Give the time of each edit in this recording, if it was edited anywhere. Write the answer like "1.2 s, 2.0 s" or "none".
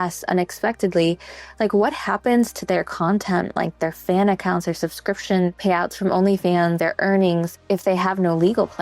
5.6 s, 6.8 s, 7.7 s